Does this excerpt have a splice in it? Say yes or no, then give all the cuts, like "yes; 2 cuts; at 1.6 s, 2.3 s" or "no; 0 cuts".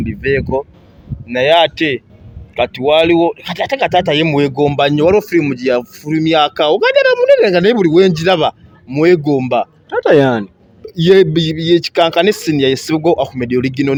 no; 0 cuts